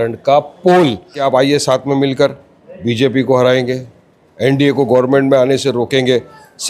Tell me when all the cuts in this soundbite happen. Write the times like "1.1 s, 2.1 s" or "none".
1.2 s